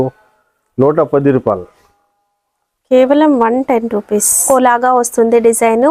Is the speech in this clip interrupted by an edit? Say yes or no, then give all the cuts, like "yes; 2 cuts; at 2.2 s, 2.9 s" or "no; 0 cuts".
yes; 1 cut; at 4.4 s